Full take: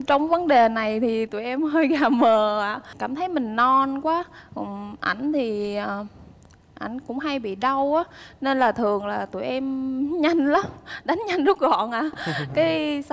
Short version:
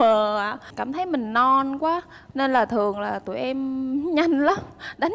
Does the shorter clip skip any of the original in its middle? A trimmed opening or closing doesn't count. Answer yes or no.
yes